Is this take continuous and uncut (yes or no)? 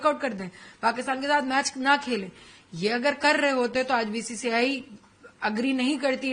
yes